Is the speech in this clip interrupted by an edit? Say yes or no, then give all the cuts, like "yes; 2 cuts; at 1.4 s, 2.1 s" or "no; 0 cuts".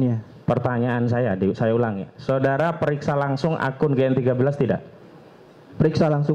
no; 0 cuts